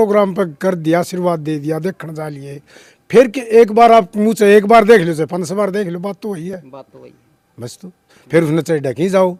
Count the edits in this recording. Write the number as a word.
zero